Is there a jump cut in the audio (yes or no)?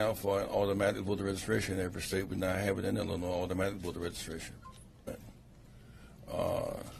no